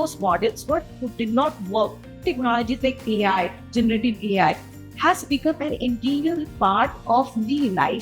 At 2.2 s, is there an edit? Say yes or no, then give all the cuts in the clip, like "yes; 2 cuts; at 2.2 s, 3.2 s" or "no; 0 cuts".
yes; 1 cut; at 2.2 s